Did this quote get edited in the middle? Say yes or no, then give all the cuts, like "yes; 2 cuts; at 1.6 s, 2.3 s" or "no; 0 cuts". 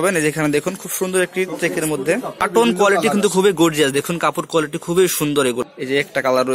yes; 2 cuts; at 2.5 s, 5.6 s